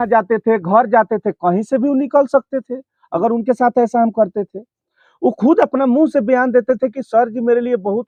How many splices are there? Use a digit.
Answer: 0